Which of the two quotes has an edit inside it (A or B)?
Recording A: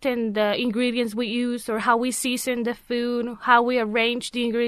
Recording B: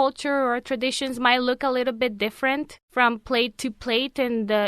B